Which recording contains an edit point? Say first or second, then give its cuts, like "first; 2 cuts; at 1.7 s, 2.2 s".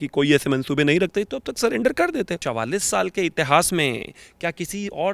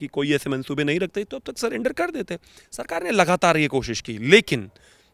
first; 1 cut; at 2.4 s